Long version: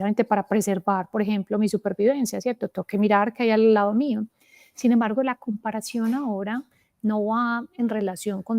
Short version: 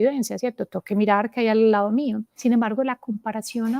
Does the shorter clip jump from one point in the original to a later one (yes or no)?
yes